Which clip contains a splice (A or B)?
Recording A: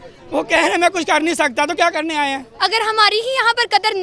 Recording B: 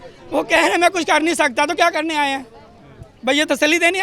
A